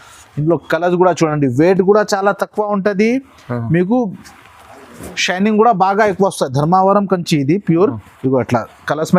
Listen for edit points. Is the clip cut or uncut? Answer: uncut